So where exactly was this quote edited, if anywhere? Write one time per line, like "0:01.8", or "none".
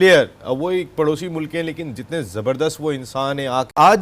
0:03.1